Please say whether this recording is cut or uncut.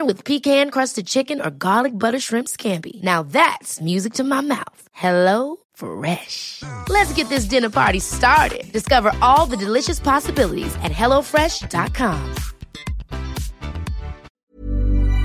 cut